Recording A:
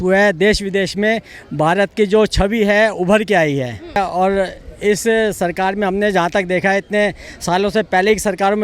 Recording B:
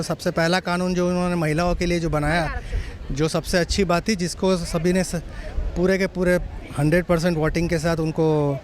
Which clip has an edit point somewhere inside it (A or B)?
A